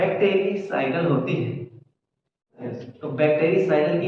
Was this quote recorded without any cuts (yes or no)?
no